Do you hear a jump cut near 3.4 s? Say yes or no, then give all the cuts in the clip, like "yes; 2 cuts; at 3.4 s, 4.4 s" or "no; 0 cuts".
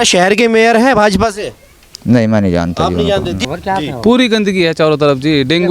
yes; 1 cut; at 3.4 s